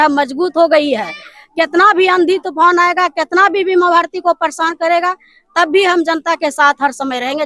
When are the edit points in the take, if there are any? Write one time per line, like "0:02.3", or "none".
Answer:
none